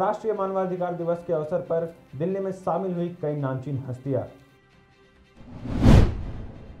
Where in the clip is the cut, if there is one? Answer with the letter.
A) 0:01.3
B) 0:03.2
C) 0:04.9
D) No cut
C